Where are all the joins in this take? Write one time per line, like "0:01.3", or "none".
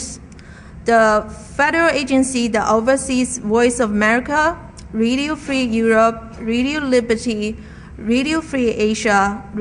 0:07.2

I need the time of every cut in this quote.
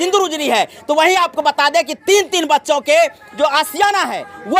0:03.2

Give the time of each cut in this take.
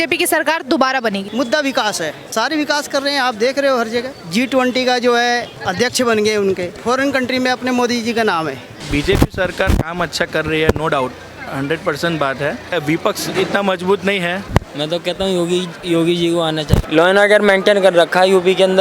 0:01.3
0:02.2
0:04.2
0:05.6
0:06.7
0:08.8
0:12.7
0:14.4
0:16.8

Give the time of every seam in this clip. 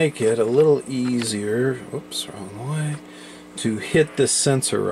none

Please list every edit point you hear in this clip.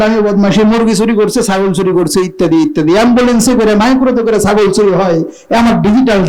none

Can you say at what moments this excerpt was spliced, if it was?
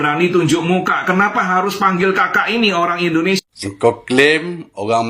0:03.4

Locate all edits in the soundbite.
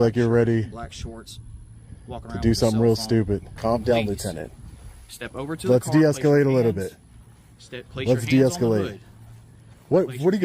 0:03.5

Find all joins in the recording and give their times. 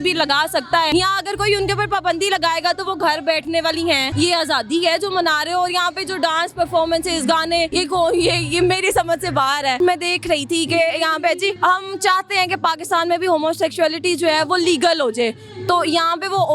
0:00.9
0:04.1
0:07.7
0:09.8
0:11.6

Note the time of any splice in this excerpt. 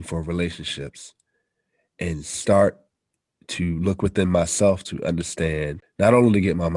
0:05.8

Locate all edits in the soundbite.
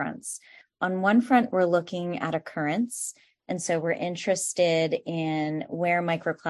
none

